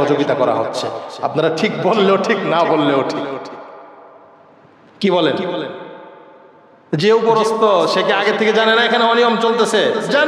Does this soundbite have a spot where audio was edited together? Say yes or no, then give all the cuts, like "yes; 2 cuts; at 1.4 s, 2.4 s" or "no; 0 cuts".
no; 0 cuts